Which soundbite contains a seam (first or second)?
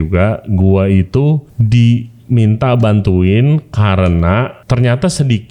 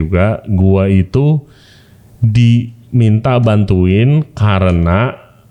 first